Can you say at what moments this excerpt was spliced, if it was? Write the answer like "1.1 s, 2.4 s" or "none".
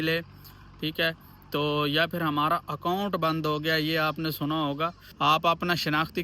5.0 s

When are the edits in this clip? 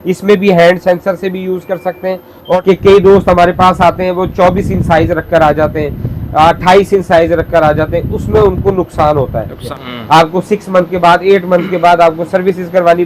2.5 s, 9.6 s

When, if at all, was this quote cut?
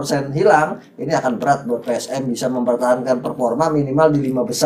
none

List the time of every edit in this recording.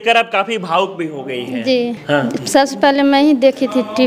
2.0 s

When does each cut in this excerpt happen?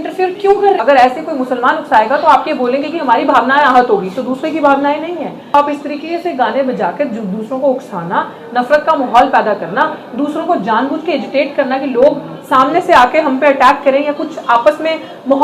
0.8 s, 5.5 s

